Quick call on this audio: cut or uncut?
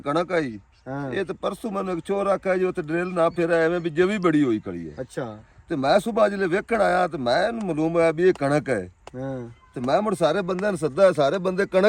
uncut